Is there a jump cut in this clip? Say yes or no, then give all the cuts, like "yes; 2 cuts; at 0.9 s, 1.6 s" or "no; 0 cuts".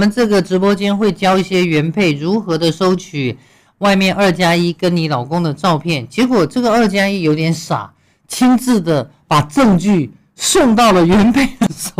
no; 0 cuts